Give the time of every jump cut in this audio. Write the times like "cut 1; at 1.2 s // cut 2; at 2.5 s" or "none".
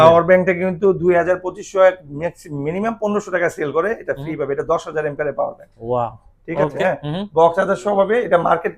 cut 1; at 6.8 s